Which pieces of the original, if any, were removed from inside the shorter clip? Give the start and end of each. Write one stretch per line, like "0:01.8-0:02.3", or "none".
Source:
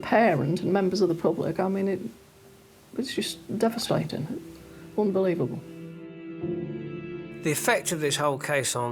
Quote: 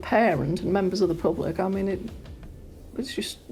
none